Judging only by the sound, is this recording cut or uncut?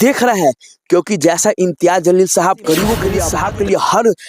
cut